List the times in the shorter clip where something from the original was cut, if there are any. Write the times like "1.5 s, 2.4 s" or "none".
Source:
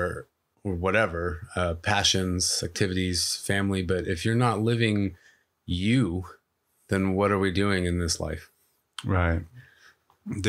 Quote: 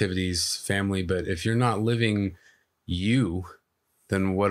none